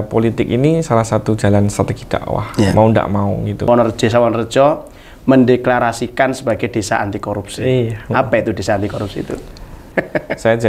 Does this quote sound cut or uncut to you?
cut